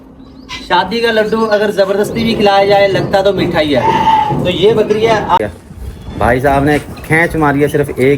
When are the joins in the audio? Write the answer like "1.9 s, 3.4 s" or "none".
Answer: 5.4 s